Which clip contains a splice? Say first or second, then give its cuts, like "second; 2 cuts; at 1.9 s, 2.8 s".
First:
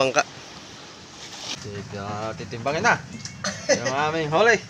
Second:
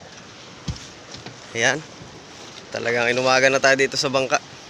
first; 1 cut; at 1.5 s